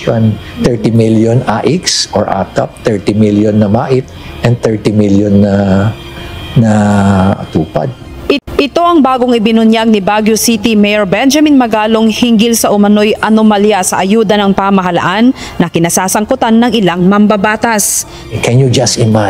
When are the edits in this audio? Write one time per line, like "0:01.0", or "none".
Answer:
0:08.4